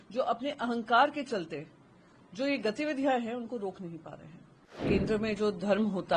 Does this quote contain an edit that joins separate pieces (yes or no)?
yes